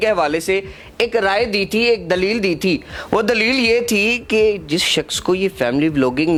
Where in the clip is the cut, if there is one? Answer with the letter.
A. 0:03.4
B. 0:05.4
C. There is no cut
C